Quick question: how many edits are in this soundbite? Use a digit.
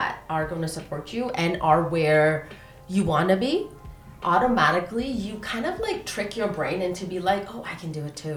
0